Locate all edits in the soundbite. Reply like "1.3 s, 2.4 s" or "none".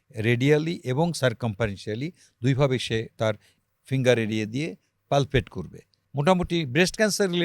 6.0 s